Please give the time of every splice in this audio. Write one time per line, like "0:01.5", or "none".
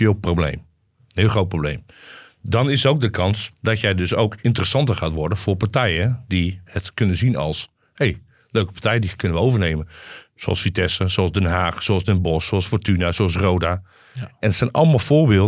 0:03.5
0:06.7